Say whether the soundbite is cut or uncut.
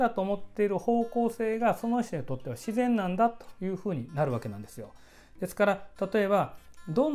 uncut